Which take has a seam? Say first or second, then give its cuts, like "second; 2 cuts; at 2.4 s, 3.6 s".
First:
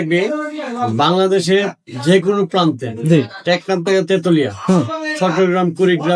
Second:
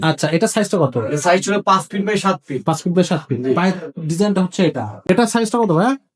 second; 1 cut; at 4.9 s